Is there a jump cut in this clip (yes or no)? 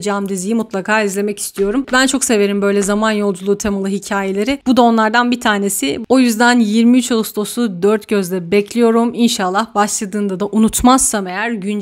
no